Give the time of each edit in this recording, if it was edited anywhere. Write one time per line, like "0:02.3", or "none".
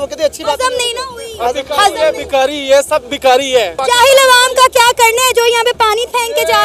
0:03.8